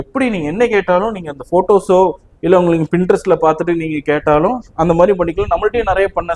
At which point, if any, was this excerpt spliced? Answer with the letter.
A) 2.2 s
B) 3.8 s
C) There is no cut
C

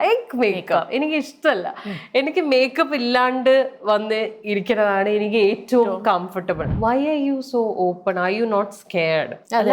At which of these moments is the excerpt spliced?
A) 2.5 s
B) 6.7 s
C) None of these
B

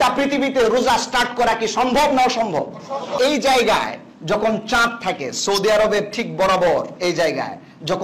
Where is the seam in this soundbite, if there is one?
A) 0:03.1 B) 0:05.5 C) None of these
A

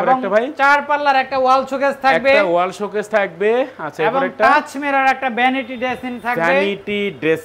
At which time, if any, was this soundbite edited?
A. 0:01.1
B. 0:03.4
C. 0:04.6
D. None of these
D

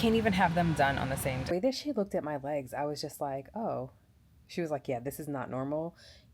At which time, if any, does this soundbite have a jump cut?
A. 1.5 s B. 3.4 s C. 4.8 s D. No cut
A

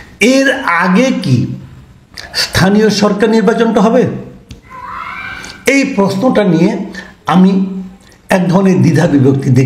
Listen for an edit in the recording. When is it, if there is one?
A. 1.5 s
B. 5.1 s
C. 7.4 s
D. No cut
D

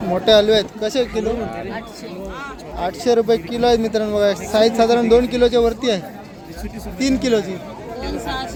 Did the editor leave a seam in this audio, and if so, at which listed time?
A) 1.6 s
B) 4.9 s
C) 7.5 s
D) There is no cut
D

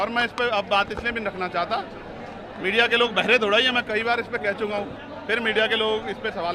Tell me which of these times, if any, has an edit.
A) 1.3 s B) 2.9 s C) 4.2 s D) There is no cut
D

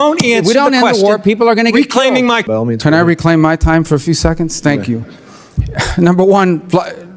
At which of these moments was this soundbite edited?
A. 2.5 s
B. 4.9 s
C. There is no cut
A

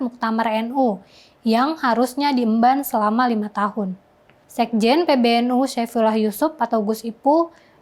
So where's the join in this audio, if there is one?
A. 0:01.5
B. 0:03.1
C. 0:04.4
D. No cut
C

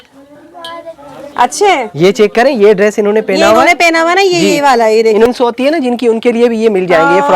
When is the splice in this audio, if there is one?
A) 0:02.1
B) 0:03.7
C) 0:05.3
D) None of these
C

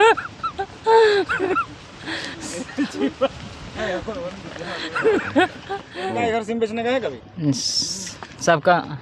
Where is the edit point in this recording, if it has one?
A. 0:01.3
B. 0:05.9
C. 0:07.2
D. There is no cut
B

